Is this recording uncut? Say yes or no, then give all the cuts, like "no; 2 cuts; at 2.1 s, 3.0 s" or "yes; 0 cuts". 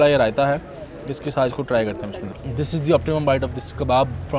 yes; 0 cuts